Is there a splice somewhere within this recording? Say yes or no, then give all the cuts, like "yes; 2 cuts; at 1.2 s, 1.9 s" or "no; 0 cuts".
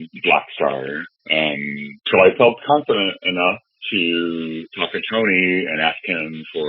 yes; 1 cut; at 2.1 s